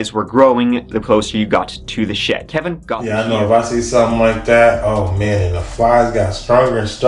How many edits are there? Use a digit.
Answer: 0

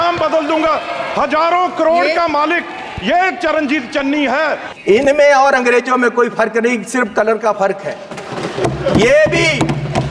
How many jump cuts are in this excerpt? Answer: 1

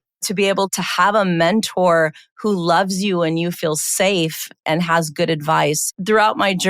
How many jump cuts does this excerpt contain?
1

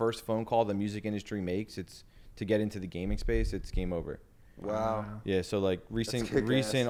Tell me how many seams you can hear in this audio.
0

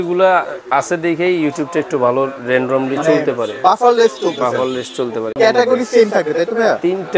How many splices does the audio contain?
1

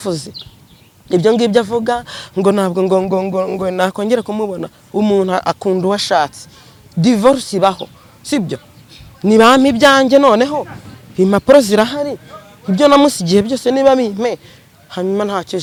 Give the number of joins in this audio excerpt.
0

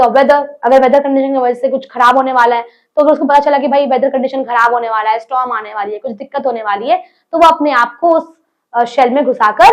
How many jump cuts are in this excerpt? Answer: 0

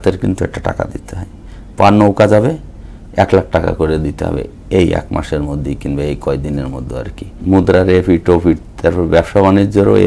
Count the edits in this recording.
1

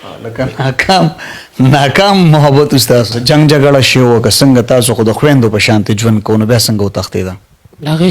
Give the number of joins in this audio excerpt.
1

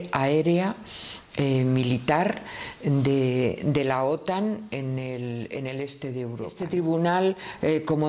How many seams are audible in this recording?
1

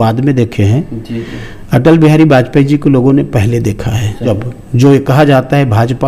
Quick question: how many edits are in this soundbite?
1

